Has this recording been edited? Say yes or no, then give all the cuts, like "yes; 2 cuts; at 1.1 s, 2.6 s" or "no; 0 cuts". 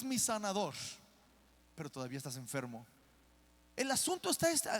yes; 1 cut; at 3.6 s